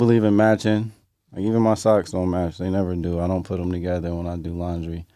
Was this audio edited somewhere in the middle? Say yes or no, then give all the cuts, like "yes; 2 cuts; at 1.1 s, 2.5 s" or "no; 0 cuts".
no; 0 cuts